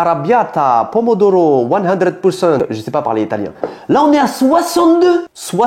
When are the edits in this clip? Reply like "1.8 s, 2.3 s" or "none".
3.7 s